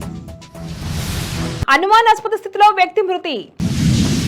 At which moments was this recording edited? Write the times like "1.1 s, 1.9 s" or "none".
none